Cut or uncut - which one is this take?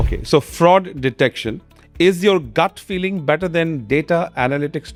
uncut